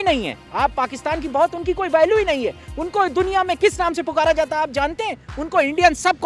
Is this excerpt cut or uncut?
uncut